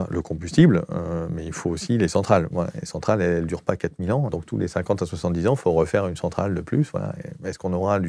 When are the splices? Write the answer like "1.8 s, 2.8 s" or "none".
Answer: 4.3 s